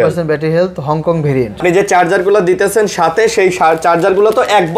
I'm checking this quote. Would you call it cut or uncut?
cut